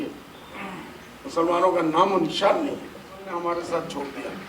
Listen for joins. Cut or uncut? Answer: cut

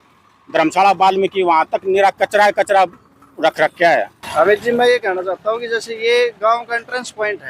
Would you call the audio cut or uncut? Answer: cut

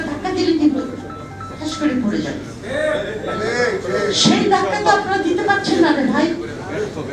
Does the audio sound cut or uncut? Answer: uncut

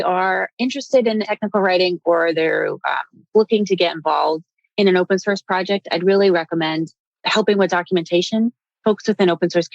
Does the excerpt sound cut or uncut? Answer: cut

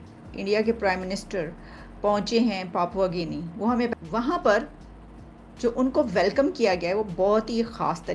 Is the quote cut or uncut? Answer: cut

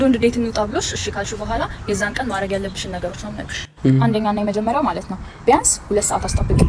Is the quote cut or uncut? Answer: uncut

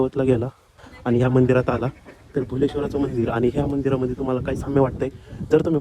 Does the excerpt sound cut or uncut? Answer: uncut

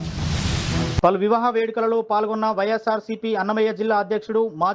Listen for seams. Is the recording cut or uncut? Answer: uncut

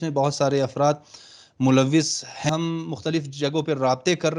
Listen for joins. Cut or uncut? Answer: cut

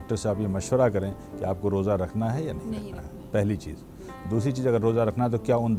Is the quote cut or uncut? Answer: uncut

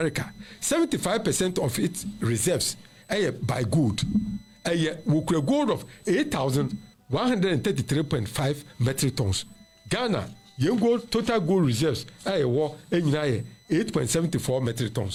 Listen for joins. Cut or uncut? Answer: uncut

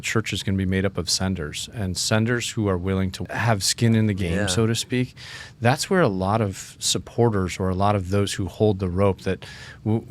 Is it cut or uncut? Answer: cut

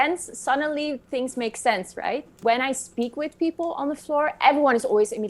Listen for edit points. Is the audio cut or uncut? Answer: cut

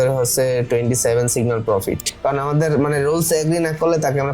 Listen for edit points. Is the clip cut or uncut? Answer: cut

